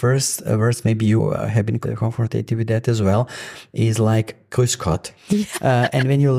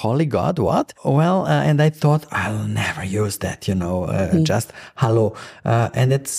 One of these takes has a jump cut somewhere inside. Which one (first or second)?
second